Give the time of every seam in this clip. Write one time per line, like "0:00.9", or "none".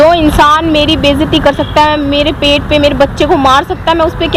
none